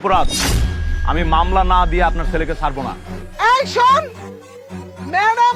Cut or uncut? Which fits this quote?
uncut